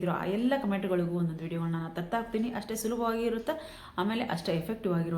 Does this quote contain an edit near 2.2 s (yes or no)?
no